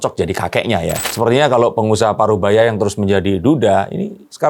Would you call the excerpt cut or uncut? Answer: cut